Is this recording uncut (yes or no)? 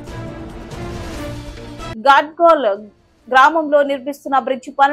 yes